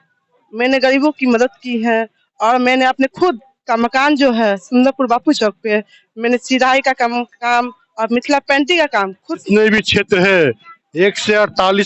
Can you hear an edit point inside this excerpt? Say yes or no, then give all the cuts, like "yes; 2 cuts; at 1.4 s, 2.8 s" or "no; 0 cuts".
yes; 1 cut; at 9.4 s